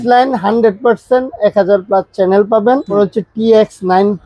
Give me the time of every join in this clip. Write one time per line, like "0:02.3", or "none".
0:02.9